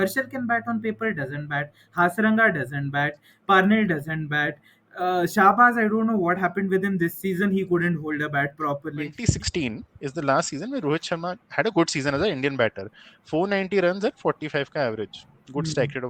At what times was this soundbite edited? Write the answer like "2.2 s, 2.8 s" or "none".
9.2 s